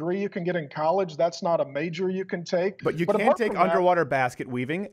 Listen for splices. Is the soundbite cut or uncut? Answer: cut